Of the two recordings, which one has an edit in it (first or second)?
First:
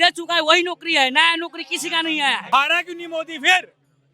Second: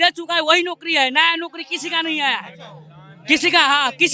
first